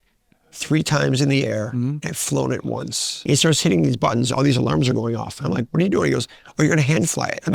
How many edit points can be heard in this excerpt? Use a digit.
1